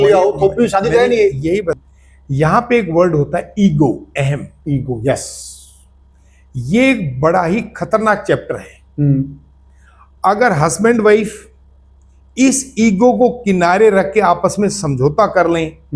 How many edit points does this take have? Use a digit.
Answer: 1